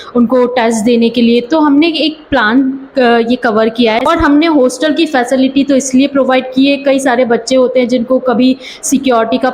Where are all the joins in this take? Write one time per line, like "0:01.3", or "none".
0:04.0